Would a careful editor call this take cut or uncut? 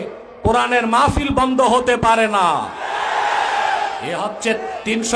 cut